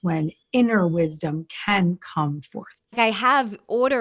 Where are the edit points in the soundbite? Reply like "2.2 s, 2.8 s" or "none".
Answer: 3.0 s